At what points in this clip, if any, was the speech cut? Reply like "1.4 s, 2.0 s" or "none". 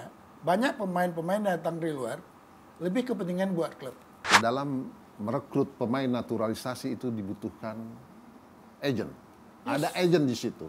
4.3 s